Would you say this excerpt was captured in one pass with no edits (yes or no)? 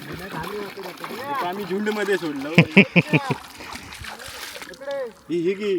yes